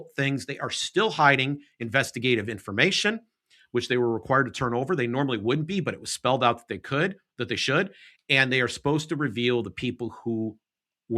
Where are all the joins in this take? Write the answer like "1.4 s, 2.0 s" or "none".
none